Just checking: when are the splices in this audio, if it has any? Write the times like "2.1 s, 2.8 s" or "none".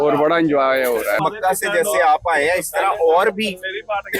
1.2 s